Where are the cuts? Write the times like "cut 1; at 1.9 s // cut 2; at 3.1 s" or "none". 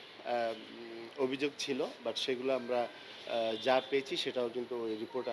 none